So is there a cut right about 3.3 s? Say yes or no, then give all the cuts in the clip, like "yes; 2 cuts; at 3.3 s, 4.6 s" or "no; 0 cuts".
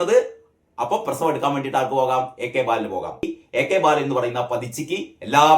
yes; 1 cut; at 3.3 s